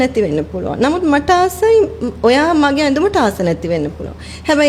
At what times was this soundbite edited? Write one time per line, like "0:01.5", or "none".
none